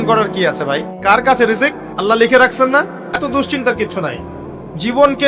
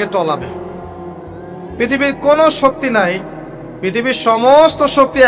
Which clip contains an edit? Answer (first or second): first